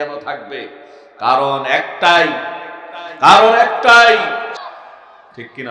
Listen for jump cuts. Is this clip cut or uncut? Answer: cut